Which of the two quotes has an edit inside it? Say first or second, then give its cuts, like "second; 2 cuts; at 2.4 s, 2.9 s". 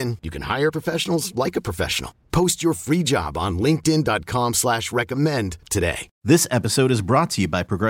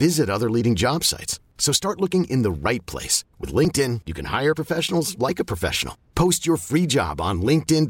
first; 1 cut; at 6.1 s